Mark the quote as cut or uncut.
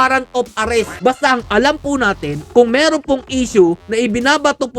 cut